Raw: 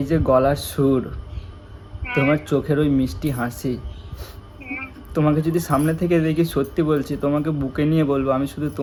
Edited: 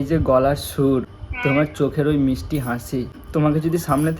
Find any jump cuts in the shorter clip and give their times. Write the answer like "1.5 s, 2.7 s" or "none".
1.2 s, 3.2 s